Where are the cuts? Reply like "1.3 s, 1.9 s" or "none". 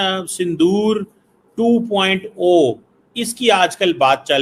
none